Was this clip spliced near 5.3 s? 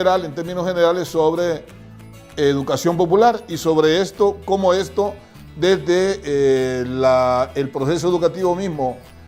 no; 0 cuts

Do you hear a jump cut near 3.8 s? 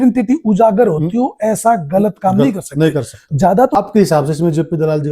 yes; 1 cut; at 3.8 s

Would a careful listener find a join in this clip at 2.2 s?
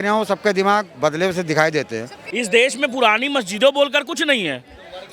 yes; 1 cut; at 2.2 s

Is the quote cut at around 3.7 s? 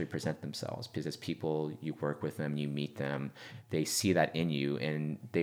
no; 0 cuts

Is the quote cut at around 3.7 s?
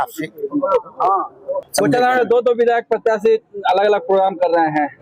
no; 1 cut; at 1.6 s

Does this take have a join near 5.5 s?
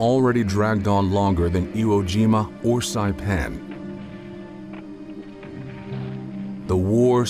no; 0 cuts

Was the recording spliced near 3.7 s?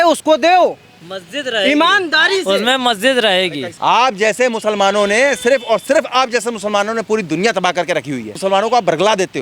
yes; 2 cuts; at 3.7 s, 8.3 s

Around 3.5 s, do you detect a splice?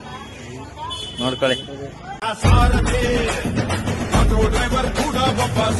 no; 1 cut; at 2.2 s

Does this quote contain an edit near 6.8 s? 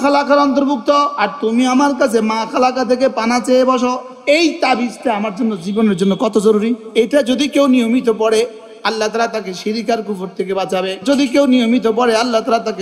yes; 4 cuts; at 1.2 s, 4.1 s, 6.8 s, 11.0 s

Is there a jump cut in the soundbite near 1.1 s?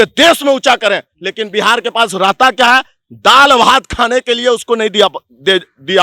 no; 0 cuts

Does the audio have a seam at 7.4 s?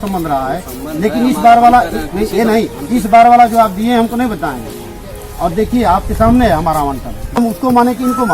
yes; 1 cut; at 7.4 s

